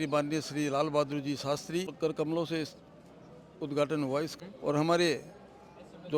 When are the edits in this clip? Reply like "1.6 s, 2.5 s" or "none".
1.9 s, 4.3 s